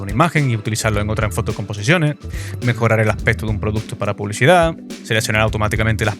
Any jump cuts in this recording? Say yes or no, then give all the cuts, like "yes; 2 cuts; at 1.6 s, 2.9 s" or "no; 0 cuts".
no; 0 cuts